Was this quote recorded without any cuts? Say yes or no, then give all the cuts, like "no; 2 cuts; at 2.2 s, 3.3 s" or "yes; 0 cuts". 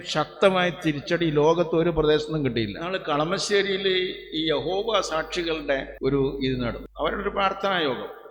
no; 3 cuts; at 2.8 s, 5.9 s, 6.8 s